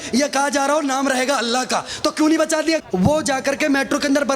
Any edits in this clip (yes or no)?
yes